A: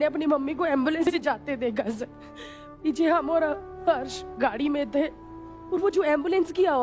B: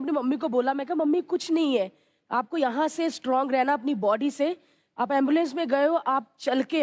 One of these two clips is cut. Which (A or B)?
A